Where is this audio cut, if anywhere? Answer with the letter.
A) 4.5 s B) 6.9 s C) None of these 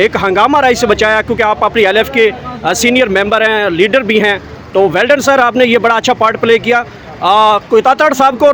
C